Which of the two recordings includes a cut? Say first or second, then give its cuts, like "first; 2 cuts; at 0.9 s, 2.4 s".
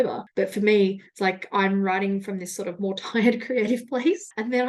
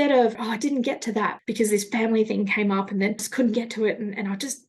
second; 2 cuts; at 1.4 s, 3.3 s